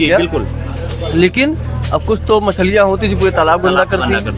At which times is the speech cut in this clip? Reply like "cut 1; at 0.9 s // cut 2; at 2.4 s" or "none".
none